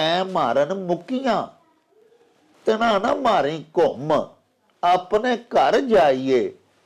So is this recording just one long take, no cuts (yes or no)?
yes